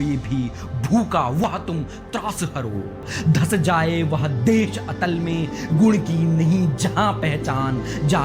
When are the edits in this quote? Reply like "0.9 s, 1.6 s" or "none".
3.1 s

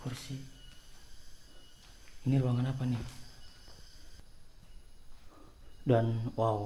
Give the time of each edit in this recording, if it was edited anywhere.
4.2 s

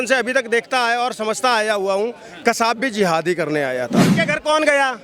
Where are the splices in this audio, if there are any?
4.1 s

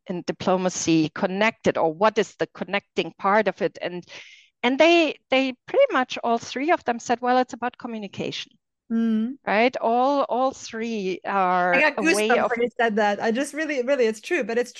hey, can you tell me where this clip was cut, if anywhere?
none

